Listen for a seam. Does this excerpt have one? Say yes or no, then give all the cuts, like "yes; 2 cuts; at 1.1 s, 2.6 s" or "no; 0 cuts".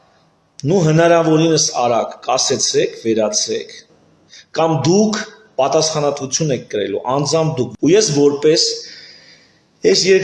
yes; 1 cut; at 7.7 s